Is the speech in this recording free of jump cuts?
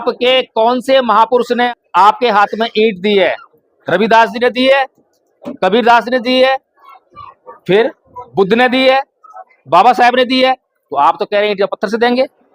no; 1 cut; at 1.7 s

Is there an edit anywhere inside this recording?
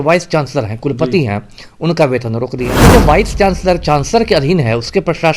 yes; 1 cut; at 2.7 s

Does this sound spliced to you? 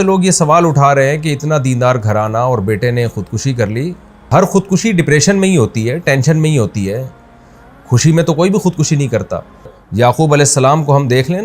yes; 2 cuts; at 4.3 s, 9.8 s

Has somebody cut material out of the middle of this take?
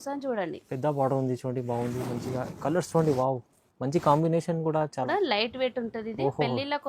yes; 1 cut; at 5.1 s

